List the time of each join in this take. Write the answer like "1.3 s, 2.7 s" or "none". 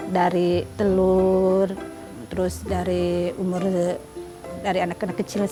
none